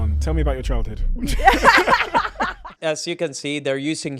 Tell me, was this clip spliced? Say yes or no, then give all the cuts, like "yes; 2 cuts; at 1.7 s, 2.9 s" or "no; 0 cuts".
yes; 1 cut; at 2.7 s